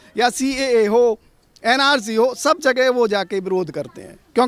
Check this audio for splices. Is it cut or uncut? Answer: uncut